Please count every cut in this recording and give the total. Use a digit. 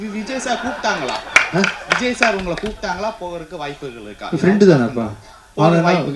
0